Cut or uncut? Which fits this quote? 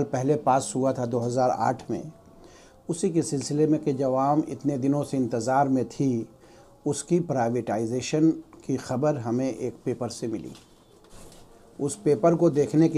uncut